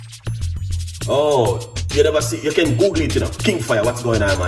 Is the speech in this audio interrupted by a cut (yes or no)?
yes